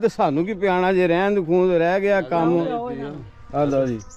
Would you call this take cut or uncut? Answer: uncut